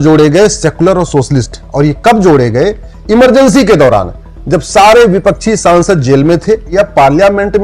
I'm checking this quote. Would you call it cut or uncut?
cut